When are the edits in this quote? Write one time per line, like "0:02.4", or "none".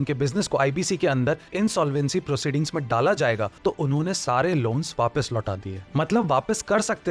none